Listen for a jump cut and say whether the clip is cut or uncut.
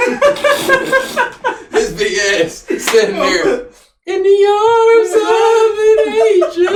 uncut